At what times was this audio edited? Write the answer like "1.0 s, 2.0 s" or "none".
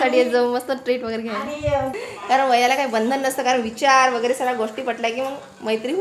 2.1 s